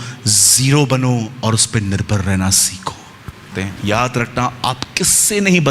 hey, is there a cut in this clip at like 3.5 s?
yes; 1 cut; at 3.5 s

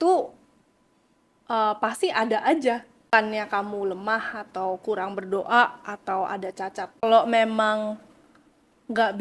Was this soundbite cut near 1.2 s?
no; 2 cuts; at 3.1 s, 7.0 s

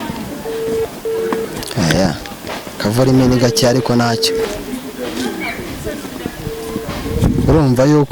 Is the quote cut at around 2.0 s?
no; 0 cuts

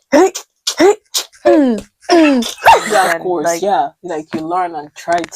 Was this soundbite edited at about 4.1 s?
no; 1 cut; at 2.9 s

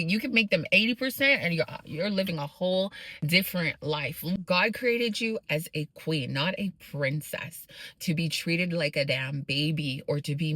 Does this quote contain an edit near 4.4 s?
yes; 1 cut; at 4.4 s

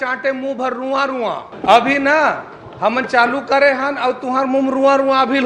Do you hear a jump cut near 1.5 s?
yes; 1 cut; at 1.5 s

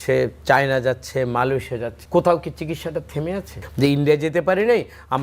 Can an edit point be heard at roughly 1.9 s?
yes; 2 cuts; at 1.9 s, 3.6 s

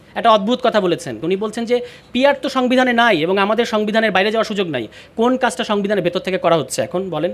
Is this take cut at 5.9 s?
no; 1 cut; at 1.2 s

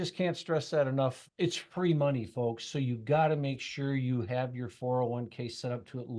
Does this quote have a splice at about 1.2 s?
yes; 1 cut; at 1.2 s

